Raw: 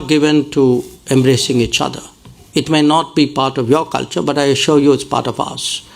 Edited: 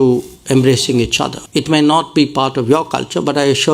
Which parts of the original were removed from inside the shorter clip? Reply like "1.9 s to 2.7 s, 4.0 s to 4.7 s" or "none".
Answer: 2.0 s to 2.4 s